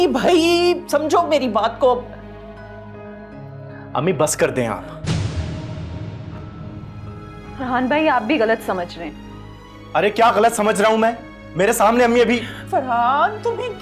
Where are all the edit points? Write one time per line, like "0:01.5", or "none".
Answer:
none